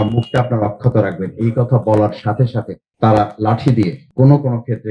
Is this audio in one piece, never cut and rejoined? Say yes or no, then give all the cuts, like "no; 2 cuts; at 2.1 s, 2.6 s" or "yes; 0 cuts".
no; 2 cuts; at 2.8 s, 4.0 s